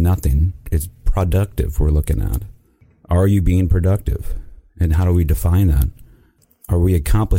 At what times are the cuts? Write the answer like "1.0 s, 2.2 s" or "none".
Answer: 2.8 s, 6.4 s